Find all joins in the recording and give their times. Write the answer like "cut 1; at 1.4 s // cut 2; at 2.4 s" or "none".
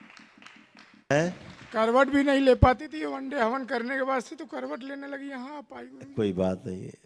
cut 1; at 1.1 s